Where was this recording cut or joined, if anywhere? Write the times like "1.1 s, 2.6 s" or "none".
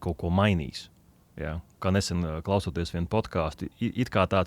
none